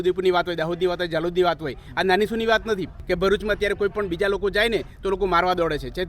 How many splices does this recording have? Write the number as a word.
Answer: one